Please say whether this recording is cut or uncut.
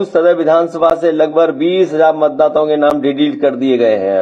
uncut